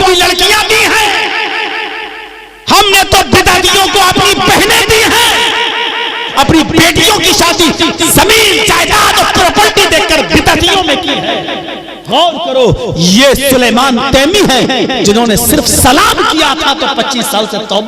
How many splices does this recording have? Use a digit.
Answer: 1